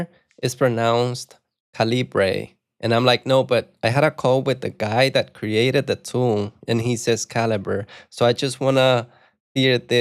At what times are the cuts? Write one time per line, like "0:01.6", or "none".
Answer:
none